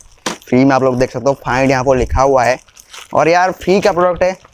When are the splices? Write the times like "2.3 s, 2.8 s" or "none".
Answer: none